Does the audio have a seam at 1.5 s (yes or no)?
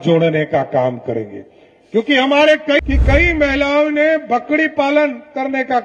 no